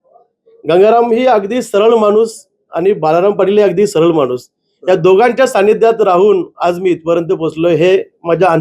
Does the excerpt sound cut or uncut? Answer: uncut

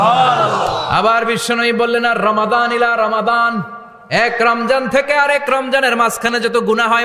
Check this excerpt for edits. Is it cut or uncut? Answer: uncut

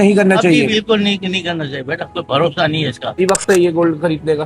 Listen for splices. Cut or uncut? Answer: cut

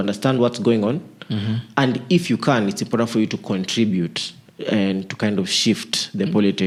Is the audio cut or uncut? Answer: uncut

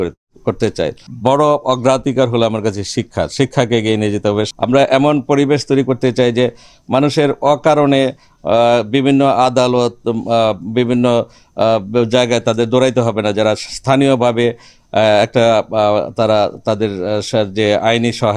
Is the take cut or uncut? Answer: cut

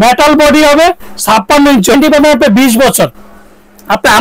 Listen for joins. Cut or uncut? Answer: cut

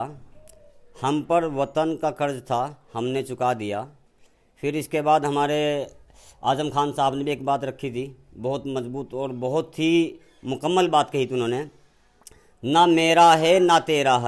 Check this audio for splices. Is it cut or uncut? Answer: uncut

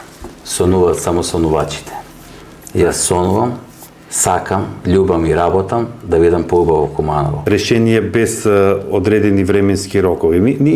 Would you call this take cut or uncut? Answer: cut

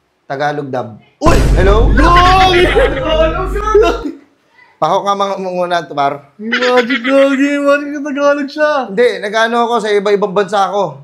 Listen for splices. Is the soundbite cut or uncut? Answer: uncut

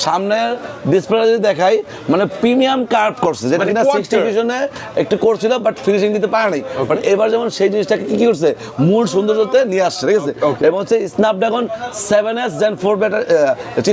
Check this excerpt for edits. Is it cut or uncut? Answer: uncut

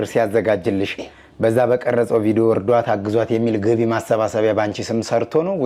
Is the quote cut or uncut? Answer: uncut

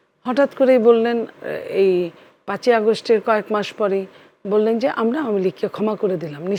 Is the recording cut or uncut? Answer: uncut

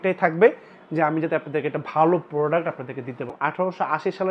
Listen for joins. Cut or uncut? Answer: cut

